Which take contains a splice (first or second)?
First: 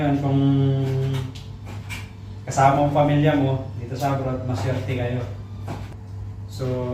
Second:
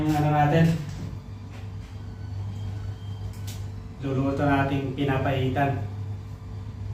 first